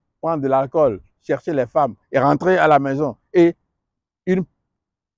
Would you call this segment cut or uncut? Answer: uncut